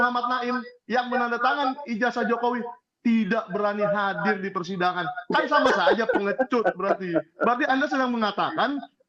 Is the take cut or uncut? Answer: uncut